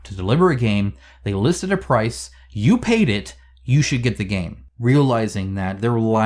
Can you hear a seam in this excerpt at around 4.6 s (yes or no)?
yes